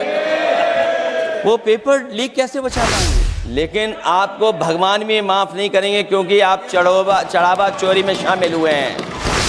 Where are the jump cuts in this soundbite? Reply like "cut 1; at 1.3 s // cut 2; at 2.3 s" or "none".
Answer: cut 1; at 3.3 s